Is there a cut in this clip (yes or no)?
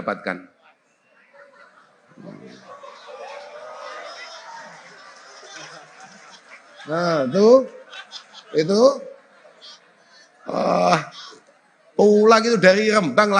no